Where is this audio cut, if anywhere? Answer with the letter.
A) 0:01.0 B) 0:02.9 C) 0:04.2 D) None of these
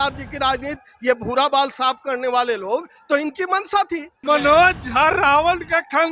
C